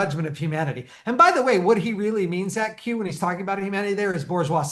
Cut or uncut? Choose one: uncut